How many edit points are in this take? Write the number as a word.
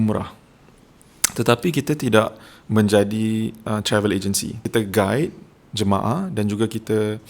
one